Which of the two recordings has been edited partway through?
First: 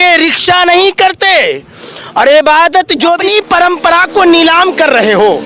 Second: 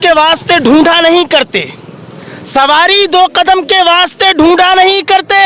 first; 1 cut; at 3.2 s

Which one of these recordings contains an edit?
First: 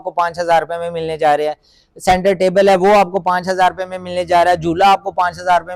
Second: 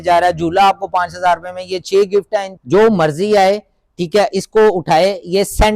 second; 1 cut; at 2.5 s

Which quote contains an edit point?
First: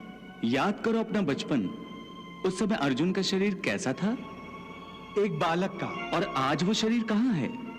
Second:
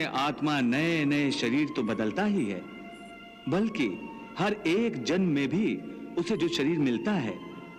first; 1 cut; at 6.0 s

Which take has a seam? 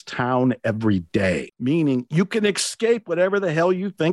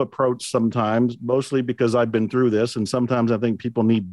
first; 1 cut; at 1.5 s

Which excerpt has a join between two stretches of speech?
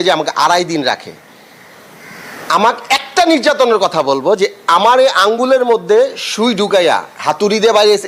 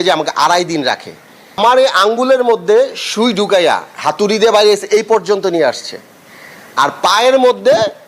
second; 1 cut; at 1.6 s

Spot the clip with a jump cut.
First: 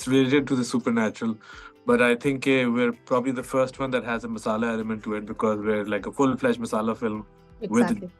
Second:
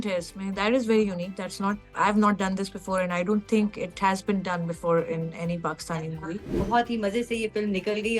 second; 1 cut; at 6.6 s

